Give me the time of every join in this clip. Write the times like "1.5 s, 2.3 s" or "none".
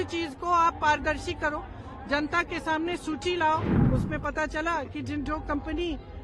3.8 s

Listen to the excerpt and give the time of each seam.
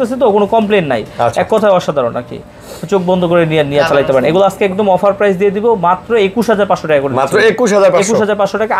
none

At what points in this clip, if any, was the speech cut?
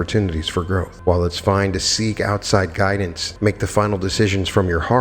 0.9 s, 3.2 s

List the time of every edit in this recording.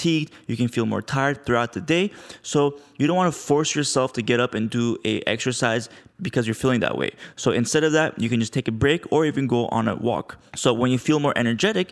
none

